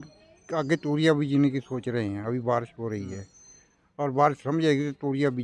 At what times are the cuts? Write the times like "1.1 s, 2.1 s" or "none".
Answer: none